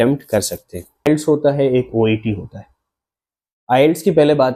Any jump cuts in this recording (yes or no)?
yes